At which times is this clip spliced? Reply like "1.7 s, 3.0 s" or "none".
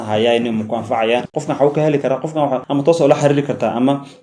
1.3 s

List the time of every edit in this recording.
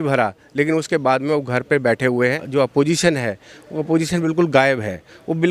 2.4 s

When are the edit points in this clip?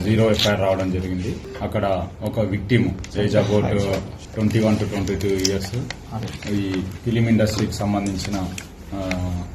1.5 s, 4.2 s

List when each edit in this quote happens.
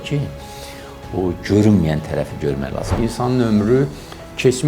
3.0 s

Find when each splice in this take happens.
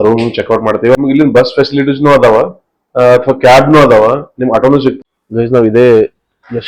1.0 s, 5.0 s

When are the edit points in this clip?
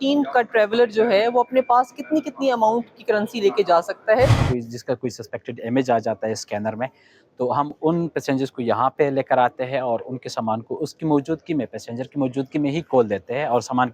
4.4 s

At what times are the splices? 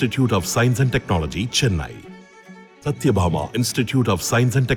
none

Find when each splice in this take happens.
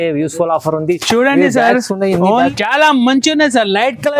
2.5 s

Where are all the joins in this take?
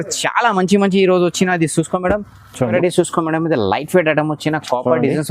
2.7 s

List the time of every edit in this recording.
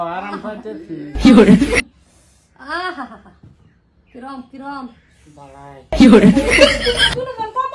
5.9 s

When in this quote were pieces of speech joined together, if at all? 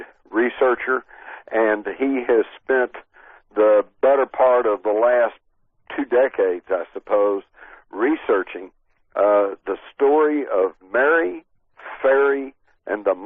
6.3 s

